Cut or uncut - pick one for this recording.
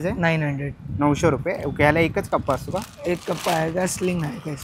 uncut